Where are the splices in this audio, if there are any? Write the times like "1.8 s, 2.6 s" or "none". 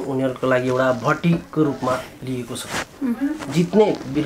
none